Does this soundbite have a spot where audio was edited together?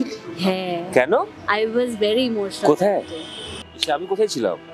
yes; 1 cut; at 3.4 s

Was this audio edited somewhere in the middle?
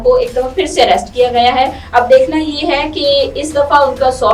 no; 0 cuts

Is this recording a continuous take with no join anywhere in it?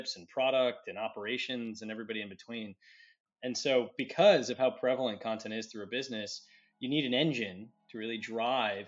no; 1 cut; at 3.2 s

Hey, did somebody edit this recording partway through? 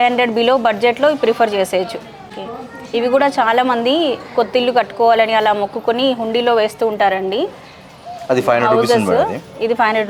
no; 0 cuts

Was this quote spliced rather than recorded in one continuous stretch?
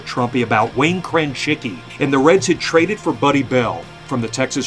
yes; 1 cut; at 1.9 s

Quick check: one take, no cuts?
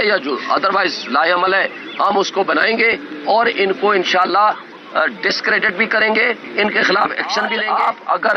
no; 1 cut; at 7.4 s

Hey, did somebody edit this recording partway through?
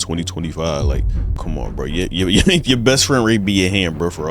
yes; 1 cut; at 1.4 s

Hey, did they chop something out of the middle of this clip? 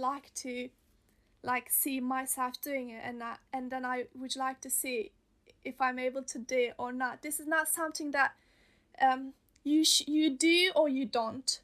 no; 0 cuts

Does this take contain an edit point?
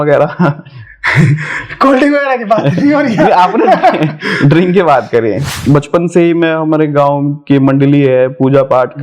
yes; 1 cut; at 5.5 s

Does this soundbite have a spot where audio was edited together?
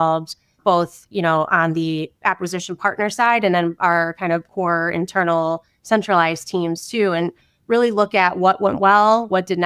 no; 0 cuts

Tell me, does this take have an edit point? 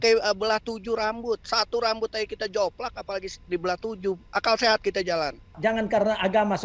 yes; 1 cut; at 5.5 s

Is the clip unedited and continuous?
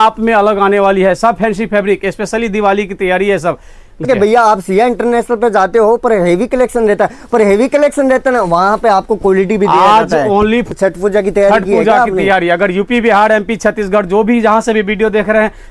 no; 2 cuts; at 4.0 s, 10.7 s

